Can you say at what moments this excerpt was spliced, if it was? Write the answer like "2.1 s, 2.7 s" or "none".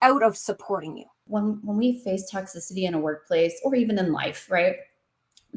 1.2 s